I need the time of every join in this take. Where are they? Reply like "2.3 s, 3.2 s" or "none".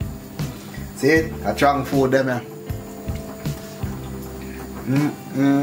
3.0 s, 4.8 s